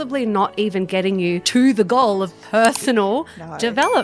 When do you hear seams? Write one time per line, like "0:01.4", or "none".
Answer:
0:01.4